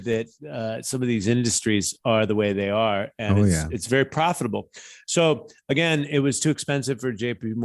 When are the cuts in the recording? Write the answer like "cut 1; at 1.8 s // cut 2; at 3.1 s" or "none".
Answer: none